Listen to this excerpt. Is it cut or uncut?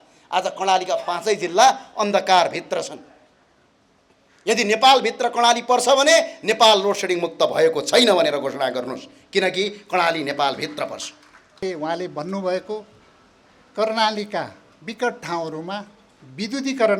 cut